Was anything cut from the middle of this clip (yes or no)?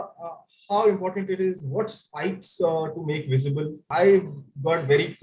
yes